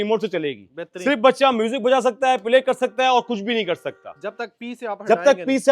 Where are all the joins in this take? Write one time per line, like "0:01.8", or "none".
none